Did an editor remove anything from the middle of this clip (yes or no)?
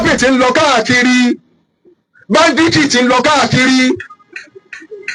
no